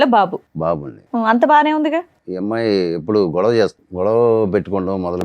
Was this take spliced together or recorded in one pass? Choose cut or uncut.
cut